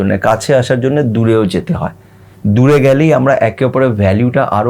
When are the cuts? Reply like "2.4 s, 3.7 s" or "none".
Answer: none